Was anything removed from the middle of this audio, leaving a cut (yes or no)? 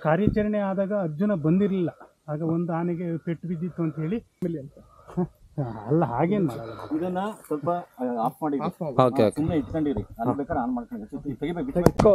yes